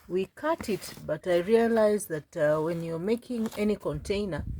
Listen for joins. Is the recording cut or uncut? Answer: uncut